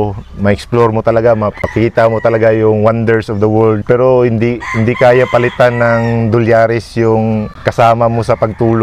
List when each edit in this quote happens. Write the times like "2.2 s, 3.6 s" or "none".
1.6 s, 3.8 s, 7.5 s